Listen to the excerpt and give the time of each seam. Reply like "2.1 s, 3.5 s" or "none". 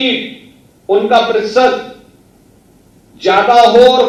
none